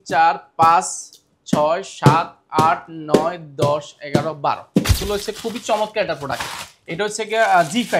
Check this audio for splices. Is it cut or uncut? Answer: cut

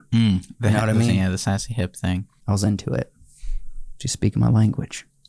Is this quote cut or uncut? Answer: cut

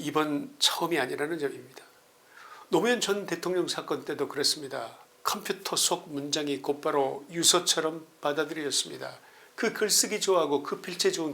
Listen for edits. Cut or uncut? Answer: cut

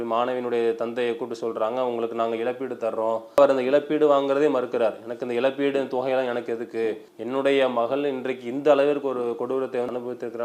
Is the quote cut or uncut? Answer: cut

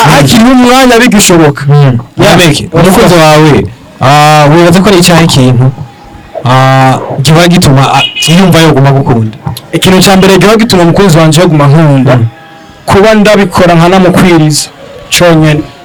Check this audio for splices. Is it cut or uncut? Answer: uncut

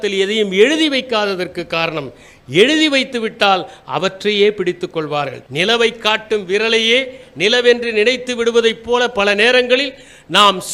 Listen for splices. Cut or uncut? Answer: uncut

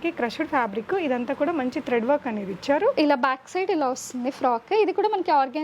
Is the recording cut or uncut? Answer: cut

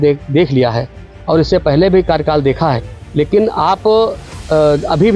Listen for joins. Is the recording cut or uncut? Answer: uncut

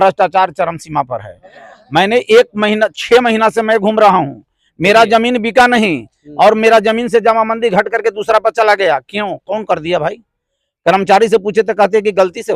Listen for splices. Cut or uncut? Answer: uncut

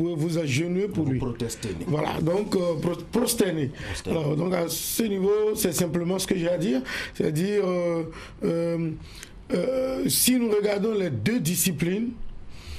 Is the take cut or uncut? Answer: cut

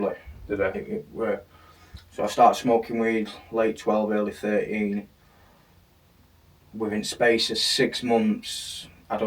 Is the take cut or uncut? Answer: uncut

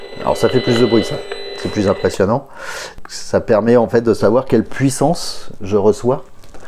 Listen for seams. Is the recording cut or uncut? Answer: cut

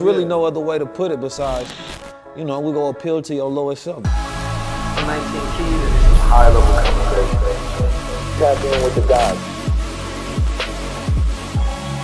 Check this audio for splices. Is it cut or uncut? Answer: cut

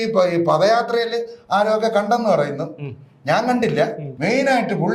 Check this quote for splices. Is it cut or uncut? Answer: cut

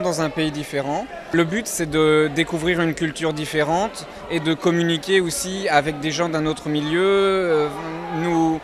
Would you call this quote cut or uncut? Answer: cut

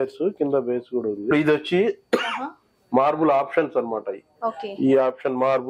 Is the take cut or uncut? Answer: cut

